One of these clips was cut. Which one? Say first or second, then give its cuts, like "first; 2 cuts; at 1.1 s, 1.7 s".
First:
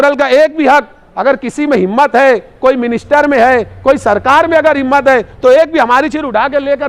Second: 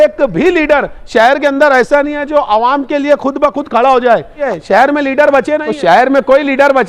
second; 2 cuts; at 4.4 s, 5.7 s